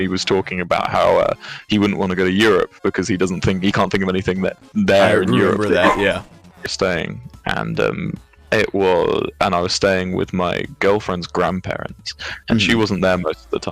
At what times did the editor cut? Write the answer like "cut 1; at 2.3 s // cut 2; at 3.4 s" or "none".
cut 1; at 6.7 s